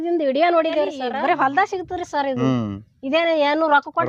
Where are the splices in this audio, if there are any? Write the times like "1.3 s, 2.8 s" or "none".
1.0 s